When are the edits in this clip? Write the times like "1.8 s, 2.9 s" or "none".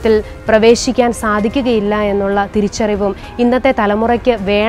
none